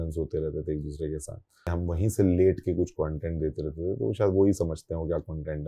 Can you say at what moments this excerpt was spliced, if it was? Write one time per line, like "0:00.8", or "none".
0:01.7